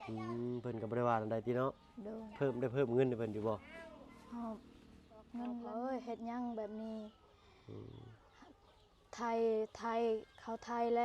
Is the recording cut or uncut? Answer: cut